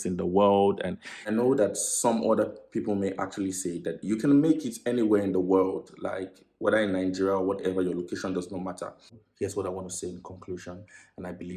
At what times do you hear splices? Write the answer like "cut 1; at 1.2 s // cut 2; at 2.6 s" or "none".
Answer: cut 1; at 1.1 s // cut 2; at 9.2 s